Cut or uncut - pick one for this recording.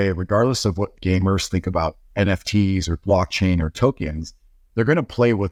uncut